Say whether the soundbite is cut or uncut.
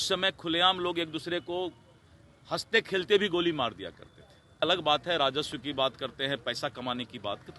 cut